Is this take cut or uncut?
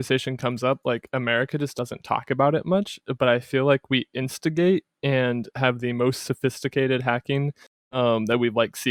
uncut